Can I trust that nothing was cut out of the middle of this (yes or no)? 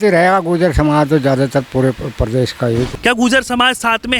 no